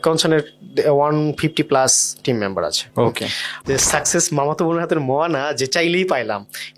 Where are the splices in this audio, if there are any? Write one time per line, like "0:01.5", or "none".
0:03.5